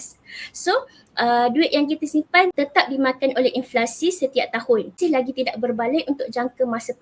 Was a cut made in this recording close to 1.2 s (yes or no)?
no